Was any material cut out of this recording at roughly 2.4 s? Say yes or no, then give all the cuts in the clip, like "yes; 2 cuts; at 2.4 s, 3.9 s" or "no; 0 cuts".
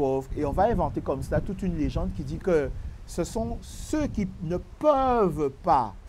yes; 1 cut; at 2.4 s